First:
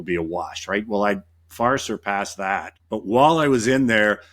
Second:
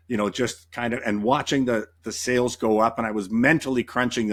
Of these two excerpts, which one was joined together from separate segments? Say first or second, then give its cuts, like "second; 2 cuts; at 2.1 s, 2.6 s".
first; 1 cut; at 2.7 s